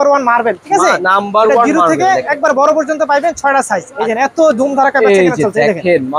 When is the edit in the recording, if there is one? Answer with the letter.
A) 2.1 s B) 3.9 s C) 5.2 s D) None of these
B